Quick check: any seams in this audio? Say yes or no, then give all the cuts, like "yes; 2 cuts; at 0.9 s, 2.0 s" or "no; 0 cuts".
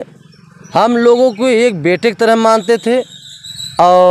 no; 0 cuts